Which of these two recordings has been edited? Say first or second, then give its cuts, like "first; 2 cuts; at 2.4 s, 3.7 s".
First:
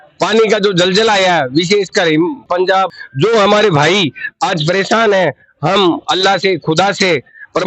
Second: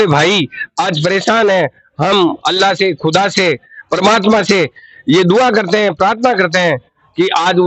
first; 1 cut; at 2.6 s